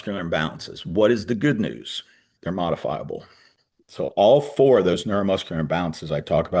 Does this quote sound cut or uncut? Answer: cut